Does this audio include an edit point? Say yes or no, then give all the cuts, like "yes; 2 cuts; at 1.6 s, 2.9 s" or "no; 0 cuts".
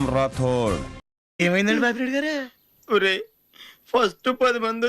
yes; 1 cut; at 1.1 s